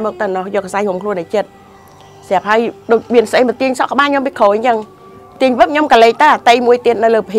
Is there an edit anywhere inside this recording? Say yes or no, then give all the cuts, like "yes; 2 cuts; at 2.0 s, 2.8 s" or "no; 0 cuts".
no; 0 cuts